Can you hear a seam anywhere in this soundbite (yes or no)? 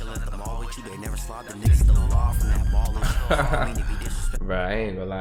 no